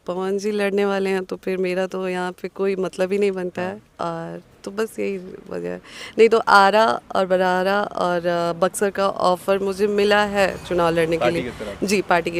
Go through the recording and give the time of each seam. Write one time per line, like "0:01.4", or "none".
none